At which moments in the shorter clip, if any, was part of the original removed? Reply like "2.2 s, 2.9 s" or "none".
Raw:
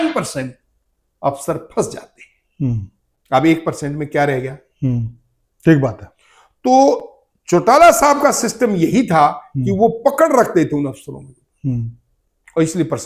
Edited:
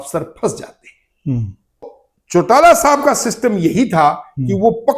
1.9 s